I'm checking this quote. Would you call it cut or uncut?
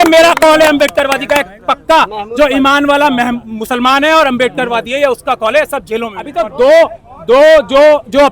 cut